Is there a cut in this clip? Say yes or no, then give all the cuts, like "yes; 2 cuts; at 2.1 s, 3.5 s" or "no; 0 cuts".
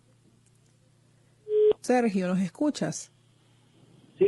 yes; 1 cut; at 3.4 s